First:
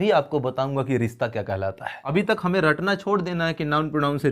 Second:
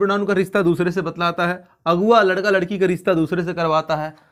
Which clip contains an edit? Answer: first; 1 cut; at 2.1 s

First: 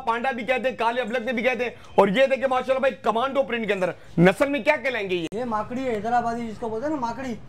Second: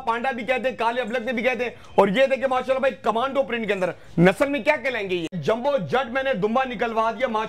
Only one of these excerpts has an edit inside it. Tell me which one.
second; 1 cut; at 5.3 s

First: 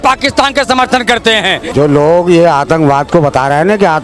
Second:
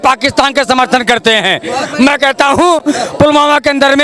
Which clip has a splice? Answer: first; 1 cut; at 1.7 s

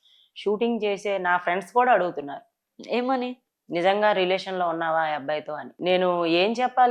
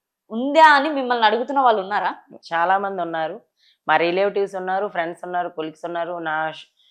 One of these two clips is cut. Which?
first; 1 cut; at 5.7 s

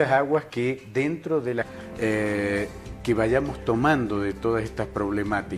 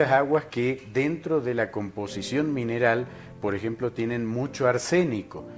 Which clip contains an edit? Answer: second; 1 cut; at 1.7 s

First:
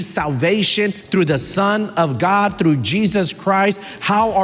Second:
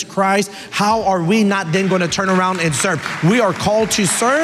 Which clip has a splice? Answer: first; 1 cut; at 1.0 s

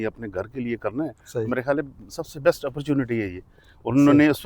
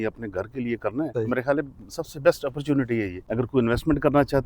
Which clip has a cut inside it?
second; 2 cuts; at 1.1 s, 3.2 s

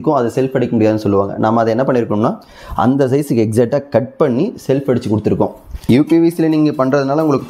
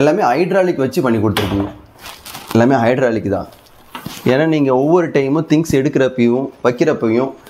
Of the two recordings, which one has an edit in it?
first; 1 cut; at 5.7 s

